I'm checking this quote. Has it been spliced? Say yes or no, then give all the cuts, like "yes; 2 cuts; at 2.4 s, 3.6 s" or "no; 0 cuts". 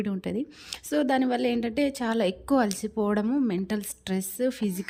no; 0 cuts